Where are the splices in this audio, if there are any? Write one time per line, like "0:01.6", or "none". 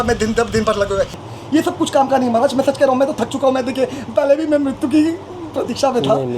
0:01.2